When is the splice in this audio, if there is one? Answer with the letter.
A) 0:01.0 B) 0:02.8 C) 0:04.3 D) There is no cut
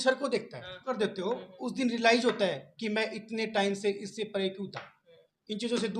A